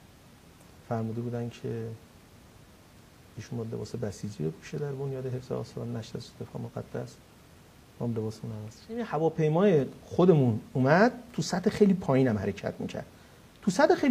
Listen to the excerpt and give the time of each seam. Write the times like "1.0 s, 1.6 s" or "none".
9.1 s

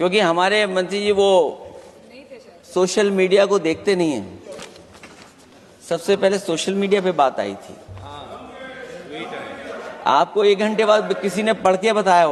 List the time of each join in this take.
none

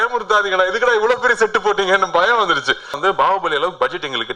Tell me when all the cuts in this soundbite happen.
3.0 s

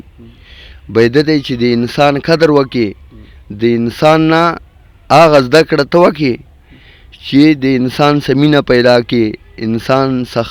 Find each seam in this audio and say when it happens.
none

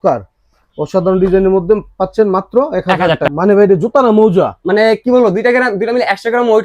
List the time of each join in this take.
3.3 s

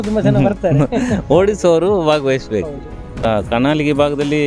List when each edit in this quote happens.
3.2 s

